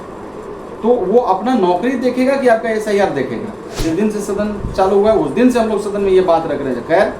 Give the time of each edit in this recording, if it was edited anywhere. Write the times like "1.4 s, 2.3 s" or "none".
3.8 s